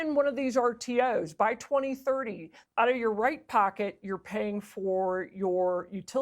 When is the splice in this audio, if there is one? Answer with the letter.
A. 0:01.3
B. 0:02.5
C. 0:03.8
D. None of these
B